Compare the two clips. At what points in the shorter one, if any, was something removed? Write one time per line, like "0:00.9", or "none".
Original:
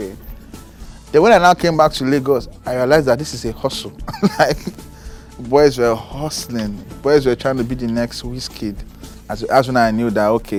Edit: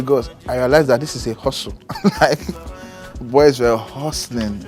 none